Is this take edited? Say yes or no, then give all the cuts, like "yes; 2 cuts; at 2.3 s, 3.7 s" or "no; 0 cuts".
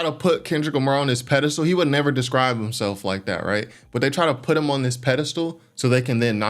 no; 0 cuts